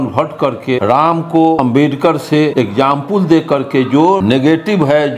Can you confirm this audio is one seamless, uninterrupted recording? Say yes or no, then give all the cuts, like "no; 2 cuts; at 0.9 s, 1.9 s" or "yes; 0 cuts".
no; 4 cuts; at 0.8 s, 1.6 s, 2.5 s, 4.2 s